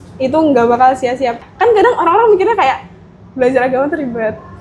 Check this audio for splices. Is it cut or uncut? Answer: cut